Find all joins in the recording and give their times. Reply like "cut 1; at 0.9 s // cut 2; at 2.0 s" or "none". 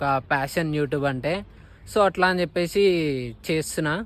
none